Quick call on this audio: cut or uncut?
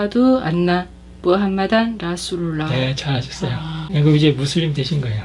cut